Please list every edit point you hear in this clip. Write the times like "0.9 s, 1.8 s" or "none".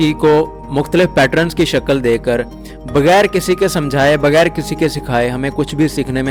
none